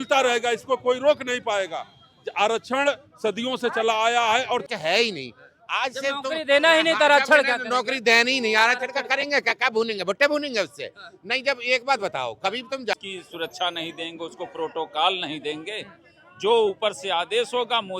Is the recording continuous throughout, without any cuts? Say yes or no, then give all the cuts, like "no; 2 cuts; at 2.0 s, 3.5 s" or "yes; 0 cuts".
no; 2 cuts; at 4.7 s, 12.9 s